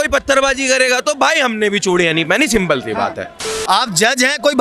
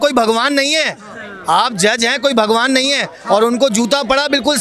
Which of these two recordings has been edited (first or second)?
first